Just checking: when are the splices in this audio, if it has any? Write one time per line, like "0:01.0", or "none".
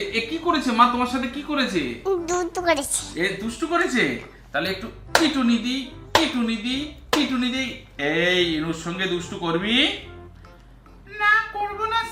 none